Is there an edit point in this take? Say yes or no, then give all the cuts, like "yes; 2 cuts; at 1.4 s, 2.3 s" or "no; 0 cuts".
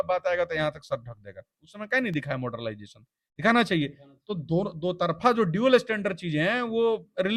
no; 0 cuts